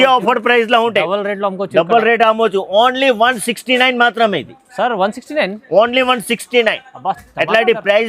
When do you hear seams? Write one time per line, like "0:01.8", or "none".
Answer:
none

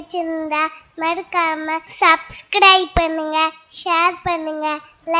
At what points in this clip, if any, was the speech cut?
0:01.9

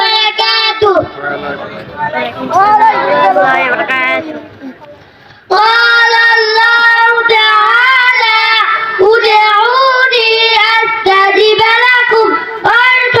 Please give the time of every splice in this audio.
none

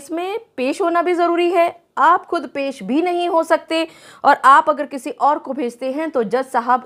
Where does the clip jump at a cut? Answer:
none

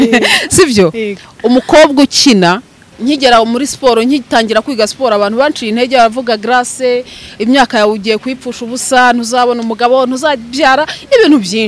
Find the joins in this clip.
0:02.9

